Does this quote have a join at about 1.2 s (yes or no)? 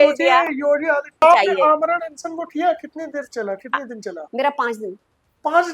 yes